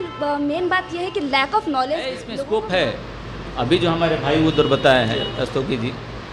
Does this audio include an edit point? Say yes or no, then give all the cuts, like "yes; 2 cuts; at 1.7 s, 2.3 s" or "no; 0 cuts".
yes; 1 cut; at 2.3 s